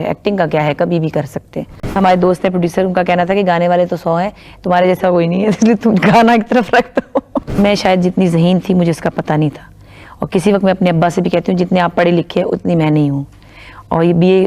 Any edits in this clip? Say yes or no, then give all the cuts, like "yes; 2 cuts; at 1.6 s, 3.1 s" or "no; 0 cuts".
yes; 2 cuts; at 1.8 s, 7.6 s